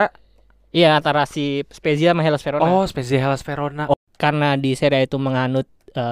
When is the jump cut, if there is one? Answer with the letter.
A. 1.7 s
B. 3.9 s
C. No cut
B